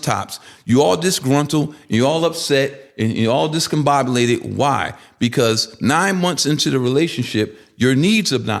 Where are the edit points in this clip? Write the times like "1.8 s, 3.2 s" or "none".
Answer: none